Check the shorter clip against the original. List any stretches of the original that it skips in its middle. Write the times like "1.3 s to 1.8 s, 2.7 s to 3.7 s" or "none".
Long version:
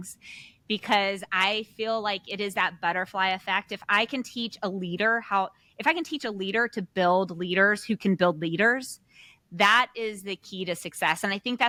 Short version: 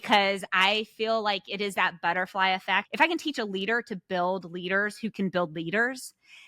3.7 s to 5.7 s